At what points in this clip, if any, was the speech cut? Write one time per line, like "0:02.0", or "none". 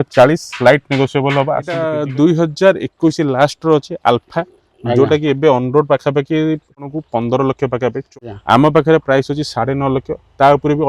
0:02.0
0:06.8
0:08.1